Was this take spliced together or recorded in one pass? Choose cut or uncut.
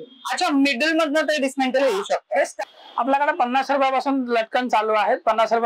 cut